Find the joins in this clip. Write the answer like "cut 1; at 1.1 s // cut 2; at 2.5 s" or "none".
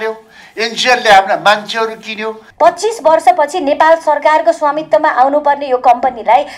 cut 1; at 2.4 s